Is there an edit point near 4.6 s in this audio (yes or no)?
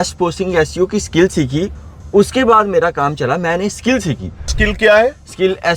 yes